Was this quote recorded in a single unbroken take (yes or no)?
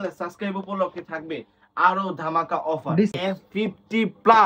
no